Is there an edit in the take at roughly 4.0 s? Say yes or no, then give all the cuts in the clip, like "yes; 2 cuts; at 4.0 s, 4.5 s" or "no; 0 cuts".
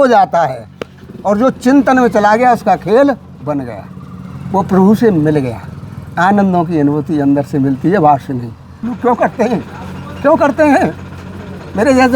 no; 1 cut; at 8.9 s